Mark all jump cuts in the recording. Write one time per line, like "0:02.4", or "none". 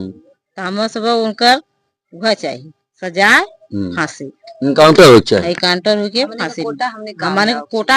none